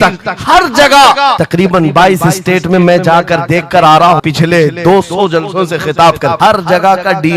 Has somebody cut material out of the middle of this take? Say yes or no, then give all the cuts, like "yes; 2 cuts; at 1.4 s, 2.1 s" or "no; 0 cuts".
yes; 3 cuts; at 1.4 s, 4.2 s, 6.4 s